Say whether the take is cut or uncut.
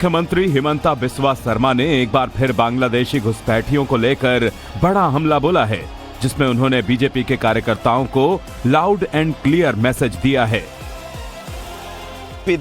cut